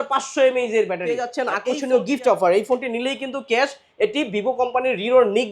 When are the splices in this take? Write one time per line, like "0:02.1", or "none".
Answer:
0:01.3